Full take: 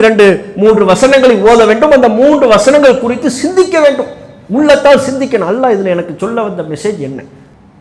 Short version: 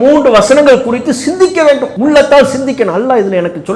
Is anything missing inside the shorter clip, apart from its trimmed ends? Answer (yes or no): yes